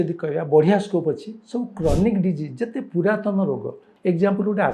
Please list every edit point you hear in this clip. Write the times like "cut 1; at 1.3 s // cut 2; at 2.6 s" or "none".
cut 1; at 3.8 s